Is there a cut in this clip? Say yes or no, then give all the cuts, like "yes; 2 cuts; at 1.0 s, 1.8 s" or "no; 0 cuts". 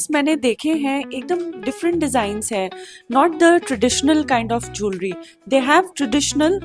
no; 0 cuts